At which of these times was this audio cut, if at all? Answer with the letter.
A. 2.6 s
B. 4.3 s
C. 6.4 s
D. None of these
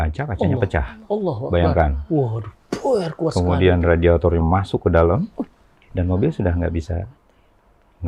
D